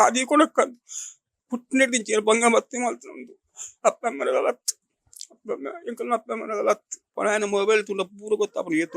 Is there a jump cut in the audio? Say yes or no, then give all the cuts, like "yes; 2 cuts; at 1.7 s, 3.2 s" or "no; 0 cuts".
yes; 1 cut; at 7.1 s